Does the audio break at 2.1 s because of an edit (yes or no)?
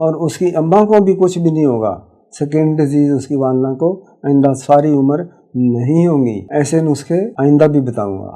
no